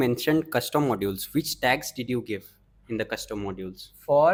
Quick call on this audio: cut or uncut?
uncut